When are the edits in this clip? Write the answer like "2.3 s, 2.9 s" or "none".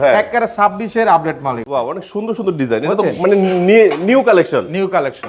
1.6 s